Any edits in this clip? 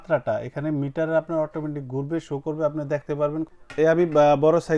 yes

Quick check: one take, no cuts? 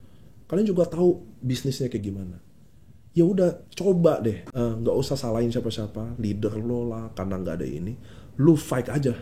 no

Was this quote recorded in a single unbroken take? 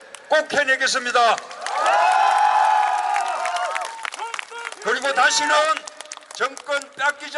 no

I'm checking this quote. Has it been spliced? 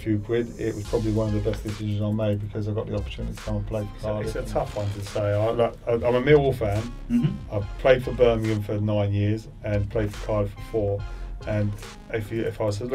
yes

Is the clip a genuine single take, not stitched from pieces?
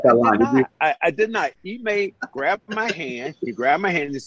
yes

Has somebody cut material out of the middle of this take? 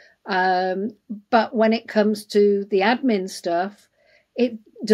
no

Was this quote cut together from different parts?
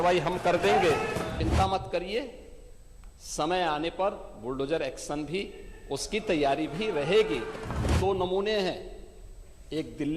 yes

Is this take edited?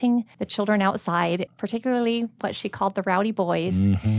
yes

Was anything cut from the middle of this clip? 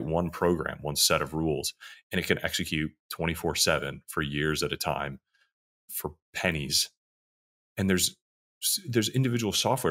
no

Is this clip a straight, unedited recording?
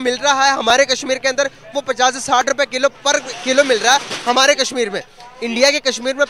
yes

